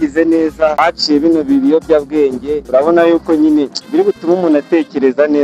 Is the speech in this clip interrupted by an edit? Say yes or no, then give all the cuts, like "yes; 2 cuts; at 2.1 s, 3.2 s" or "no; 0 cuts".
yes; 2 cuts; at 0.8 s, 2.6 s